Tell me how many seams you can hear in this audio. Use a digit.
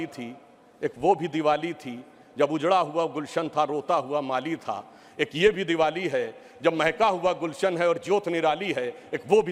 0